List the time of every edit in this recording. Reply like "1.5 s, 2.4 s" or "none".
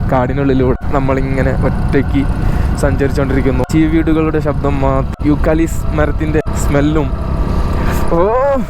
0.8 s, 3.7 s, 5.1 s, 6.4 s